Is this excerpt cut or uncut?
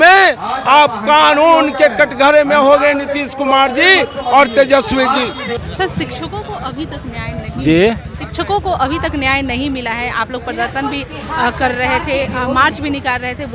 uncut